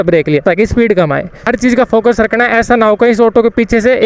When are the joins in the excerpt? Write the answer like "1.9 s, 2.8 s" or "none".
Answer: 1.5 s